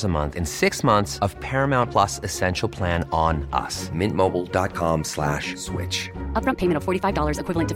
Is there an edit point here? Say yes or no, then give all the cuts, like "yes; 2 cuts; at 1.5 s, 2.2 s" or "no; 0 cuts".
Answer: no; 0 cuts